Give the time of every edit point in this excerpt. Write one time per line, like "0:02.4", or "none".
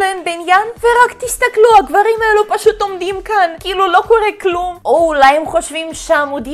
none